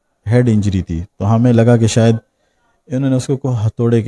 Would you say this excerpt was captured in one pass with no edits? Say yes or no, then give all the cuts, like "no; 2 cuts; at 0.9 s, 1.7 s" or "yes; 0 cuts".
yes; 0 cuts